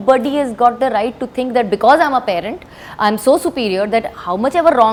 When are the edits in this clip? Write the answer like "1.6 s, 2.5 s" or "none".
none